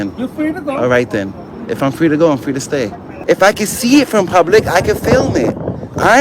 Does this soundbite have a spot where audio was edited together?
yes; 1 cut; at 3.0 s

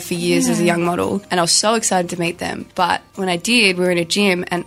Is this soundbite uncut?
no; 2 cuts; at 1.3 s, 2.6 s

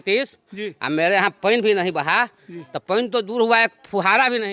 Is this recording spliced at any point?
no; 0 cuts

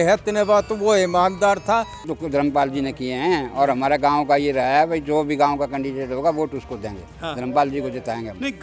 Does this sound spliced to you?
yes; 1 cut; at 2.1 s

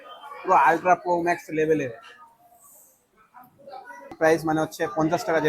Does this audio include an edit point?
yes; 1 cut; at 4.1 s

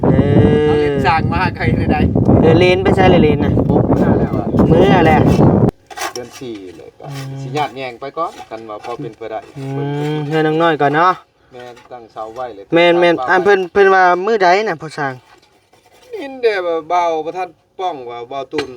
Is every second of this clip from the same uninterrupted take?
no; 1 cut; at 5.7 s

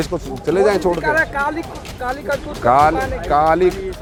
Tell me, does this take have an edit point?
no; 0 cuts

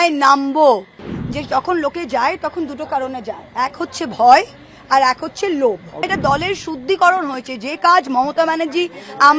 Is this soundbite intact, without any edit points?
no; 2 cuts; at 1.1 s, 6.1 s

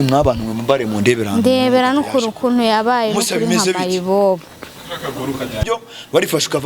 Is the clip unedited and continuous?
no; 1 cut; at 5.6 s

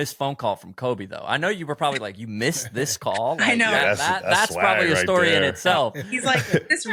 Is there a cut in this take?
no; 0 cuts

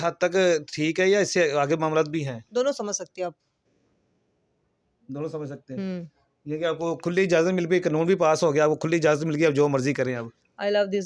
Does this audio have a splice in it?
no; 0 cuts

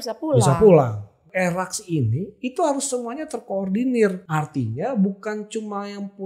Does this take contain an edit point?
yes; 2 cuts; at 1.2 s, 4.2 s

